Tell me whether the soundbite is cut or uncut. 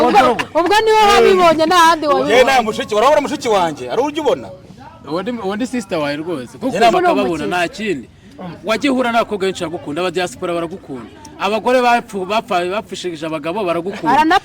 cut